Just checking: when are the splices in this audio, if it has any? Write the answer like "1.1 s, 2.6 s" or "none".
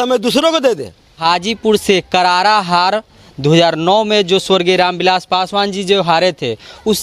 1.2 s